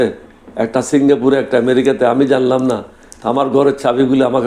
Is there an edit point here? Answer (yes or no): no